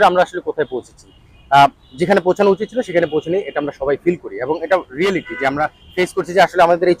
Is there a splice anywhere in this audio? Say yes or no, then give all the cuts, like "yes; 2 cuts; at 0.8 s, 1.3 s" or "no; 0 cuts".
no; 0 cuts